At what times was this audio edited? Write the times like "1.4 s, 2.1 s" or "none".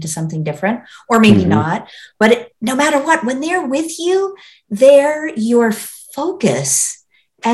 none